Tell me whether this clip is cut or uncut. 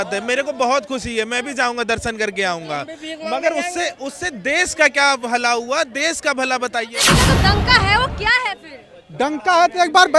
cut